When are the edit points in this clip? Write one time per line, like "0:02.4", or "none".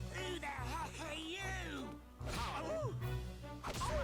none